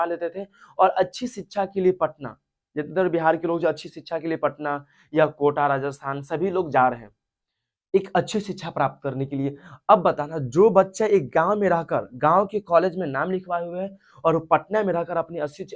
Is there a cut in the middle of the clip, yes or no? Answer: no